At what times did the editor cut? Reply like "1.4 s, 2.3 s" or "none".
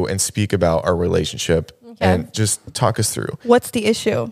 none